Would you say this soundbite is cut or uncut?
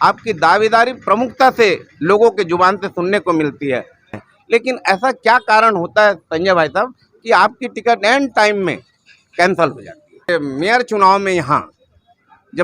cut